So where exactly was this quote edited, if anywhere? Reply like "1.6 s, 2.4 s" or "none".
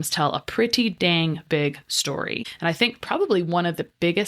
2.5 s